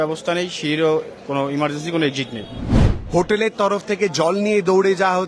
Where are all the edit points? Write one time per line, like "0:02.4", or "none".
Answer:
0:03.0